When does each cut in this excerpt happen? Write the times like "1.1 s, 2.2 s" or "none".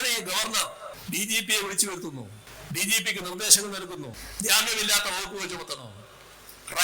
1.0 s, 2.5 s, 4.2 s